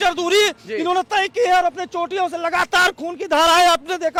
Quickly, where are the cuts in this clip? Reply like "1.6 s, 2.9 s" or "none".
none